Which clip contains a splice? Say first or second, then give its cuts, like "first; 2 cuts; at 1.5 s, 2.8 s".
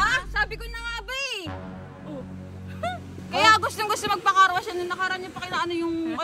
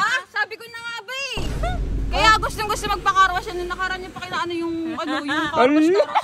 second; 1 cut; at 1.5 s